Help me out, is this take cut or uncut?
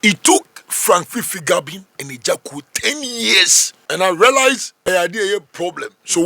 cut